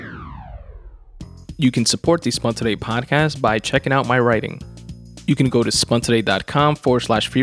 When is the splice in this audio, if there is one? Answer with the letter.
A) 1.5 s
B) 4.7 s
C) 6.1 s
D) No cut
A